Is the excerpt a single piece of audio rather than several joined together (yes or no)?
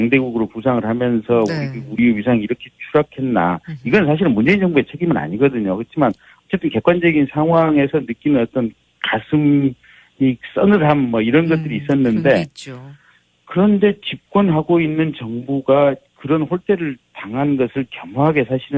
no